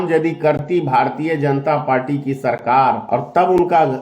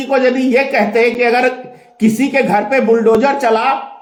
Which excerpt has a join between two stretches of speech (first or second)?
first